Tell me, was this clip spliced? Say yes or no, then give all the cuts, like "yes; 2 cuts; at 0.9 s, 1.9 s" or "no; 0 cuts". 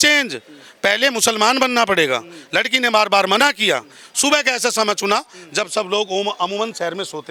no; 0 cuts